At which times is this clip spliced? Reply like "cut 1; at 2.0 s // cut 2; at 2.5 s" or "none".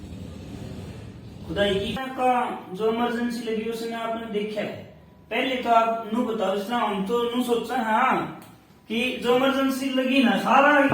cut 1; at 2.0 s